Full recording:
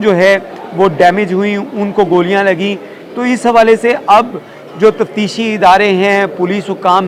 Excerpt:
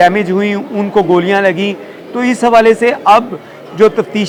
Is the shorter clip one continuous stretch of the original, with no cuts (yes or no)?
yes